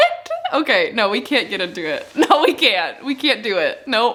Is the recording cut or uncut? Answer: uncut